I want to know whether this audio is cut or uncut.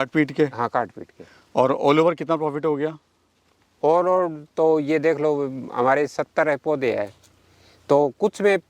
uncut